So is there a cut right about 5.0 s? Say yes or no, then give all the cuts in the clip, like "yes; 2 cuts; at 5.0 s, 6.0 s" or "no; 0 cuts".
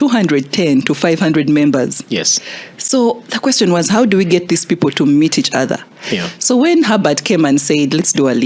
no; 0 cuts